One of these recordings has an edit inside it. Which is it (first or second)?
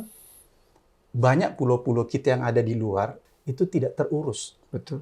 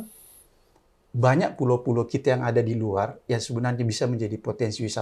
first